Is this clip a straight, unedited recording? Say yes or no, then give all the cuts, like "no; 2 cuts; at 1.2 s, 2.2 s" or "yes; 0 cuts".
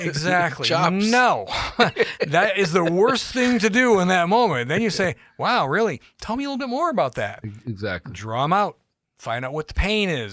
yes; 0 cuts